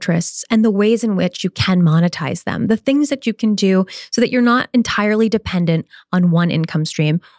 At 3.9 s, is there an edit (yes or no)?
no